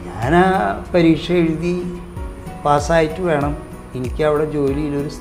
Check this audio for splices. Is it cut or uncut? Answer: uncut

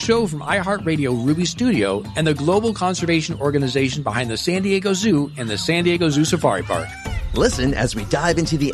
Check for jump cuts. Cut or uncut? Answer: uncut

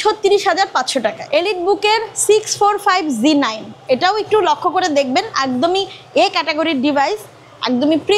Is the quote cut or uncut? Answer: cut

